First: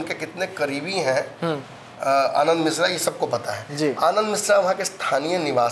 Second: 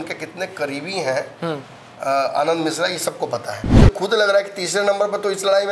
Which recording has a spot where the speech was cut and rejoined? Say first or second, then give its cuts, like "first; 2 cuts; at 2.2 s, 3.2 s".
second; 1 cut; at 3.7 s